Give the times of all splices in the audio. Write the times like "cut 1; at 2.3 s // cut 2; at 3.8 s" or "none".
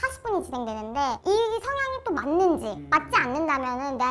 cut 1; at 1.2 s // cut 2; at 2.8 s